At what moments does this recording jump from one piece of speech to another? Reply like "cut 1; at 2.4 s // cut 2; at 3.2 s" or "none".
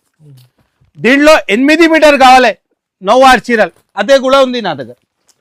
none